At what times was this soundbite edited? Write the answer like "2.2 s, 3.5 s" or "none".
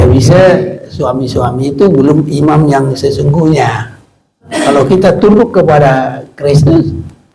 4.5 s

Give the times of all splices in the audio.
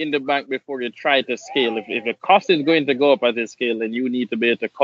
none

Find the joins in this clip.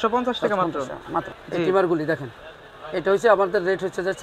1.4 s

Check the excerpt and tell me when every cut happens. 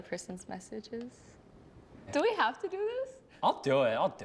1.9 s

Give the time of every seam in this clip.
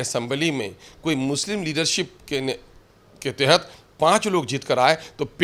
none

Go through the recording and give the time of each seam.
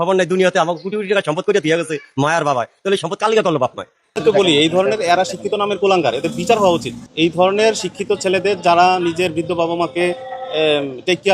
4.2 s

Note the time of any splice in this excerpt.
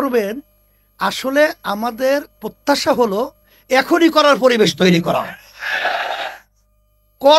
none

